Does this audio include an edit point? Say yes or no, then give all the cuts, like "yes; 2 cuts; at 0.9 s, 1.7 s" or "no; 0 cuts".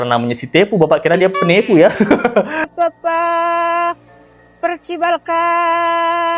yes; 1 cut; at 2.7 s